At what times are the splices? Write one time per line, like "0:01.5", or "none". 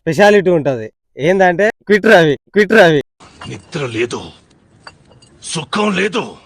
none